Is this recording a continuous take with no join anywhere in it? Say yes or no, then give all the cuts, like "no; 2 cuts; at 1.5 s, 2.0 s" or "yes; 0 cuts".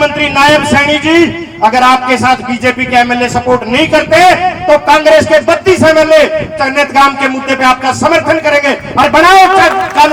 yes; 0 cuts